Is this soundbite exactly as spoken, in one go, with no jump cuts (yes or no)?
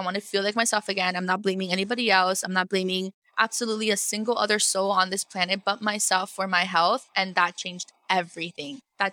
yes